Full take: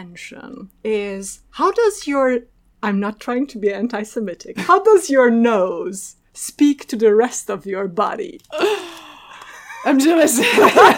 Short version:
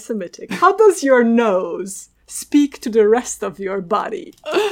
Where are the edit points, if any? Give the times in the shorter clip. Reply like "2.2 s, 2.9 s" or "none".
none